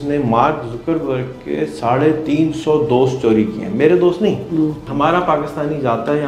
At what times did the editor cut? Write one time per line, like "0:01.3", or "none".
0:04.9